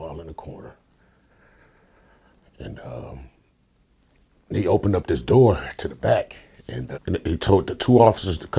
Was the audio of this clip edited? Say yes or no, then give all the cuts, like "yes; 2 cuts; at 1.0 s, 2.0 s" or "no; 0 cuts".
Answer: yes; 1 cut; at 6.9 s